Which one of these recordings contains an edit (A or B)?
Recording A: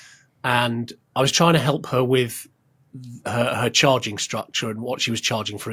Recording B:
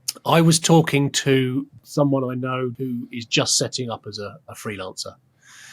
B